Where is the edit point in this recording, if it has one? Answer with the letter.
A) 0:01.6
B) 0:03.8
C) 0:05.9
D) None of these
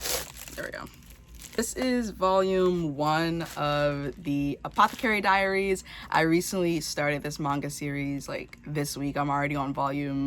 A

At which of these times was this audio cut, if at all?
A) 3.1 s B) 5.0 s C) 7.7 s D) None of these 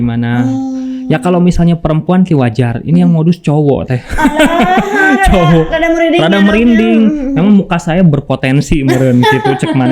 D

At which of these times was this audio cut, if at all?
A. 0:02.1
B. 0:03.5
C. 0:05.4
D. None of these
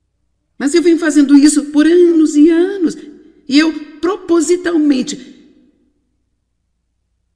D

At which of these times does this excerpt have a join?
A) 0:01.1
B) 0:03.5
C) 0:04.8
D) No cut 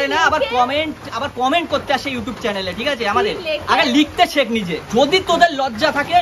C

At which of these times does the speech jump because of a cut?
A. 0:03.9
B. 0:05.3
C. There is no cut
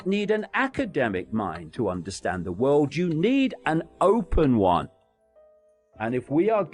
B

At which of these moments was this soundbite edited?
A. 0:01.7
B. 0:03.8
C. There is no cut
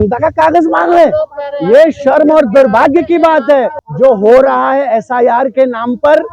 B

